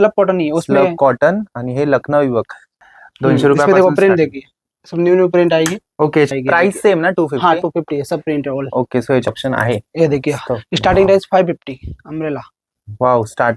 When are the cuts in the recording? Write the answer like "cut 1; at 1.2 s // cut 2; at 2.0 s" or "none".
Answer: cut 1; at 2.7 s // cut 2; at 6.3 s // cut 3; at 9.3 s